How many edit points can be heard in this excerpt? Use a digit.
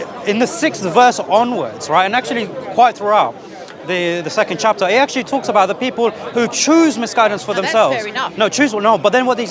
0